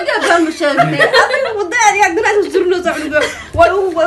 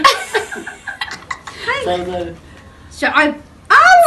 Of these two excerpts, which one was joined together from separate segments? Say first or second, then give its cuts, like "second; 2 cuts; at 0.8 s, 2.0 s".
second; 1 cut; at 3.1 s